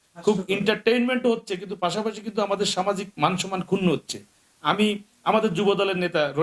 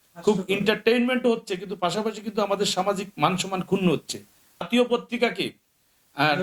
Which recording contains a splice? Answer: second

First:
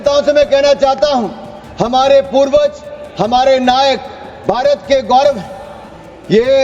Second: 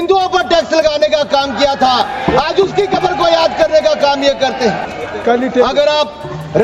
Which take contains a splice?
second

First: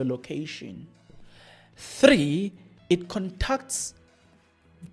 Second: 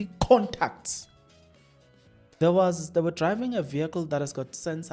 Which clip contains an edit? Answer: second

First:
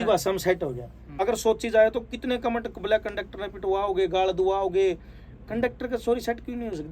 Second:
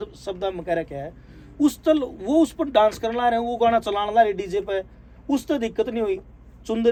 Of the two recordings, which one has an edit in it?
first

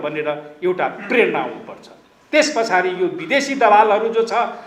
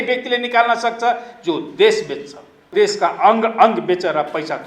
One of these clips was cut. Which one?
second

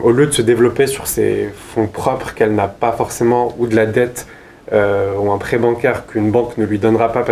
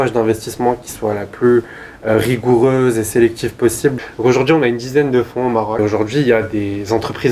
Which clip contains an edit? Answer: second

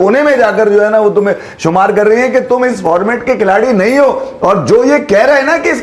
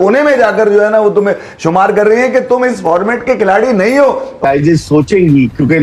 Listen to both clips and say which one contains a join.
second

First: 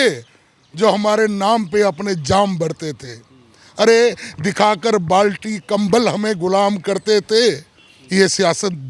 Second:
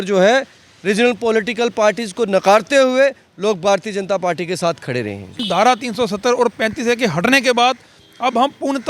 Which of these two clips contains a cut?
second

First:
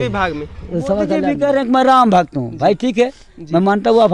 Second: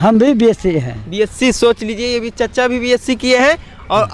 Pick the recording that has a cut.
first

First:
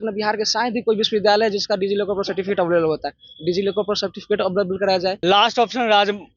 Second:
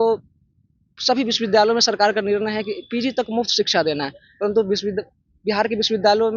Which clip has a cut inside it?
first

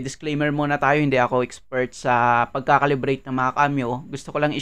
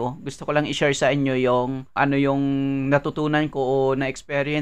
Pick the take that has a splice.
second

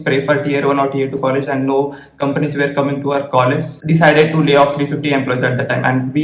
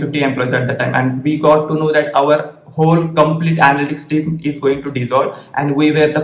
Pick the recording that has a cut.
first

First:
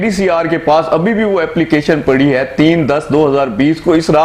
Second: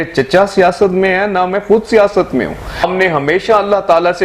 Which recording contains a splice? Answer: second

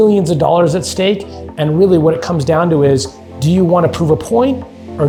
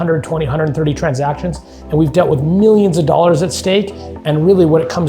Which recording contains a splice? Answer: second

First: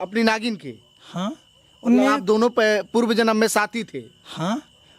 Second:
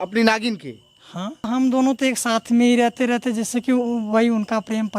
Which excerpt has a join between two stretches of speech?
second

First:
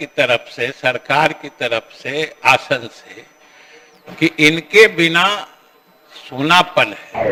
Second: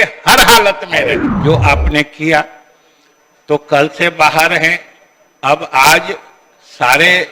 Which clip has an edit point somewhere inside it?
second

